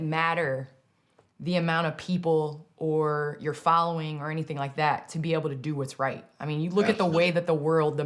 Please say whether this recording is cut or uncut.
uncut